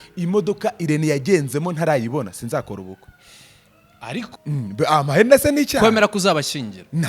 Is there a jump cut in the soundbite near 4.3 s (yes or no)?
yes